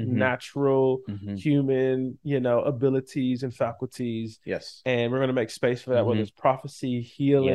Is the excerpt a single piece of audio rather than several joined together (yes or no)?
yes